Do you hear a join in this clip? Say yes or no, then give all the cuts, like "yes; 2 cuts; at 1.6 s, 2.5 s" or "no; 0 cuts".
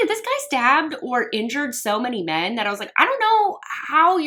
no; 0 cuts